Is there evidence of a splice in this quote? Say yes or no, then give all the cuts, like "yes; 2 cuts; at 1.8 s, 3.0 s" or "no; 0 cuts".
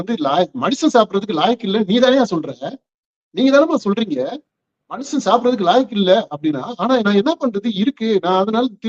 no; 0 cuts